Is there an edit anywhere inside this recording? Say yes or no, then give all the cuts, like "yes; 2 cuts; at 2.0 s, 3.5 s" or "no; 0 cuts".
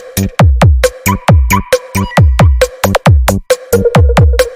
no; 0 cuts